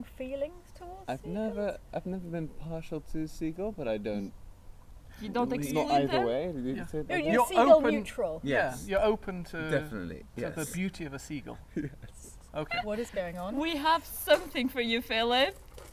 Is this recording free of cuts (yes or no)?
yes